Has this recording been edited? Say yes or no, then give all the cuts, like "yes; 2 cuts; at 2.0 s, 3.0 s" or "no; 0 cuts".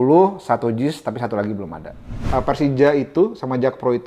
yes; 1 cut; at 2.2 s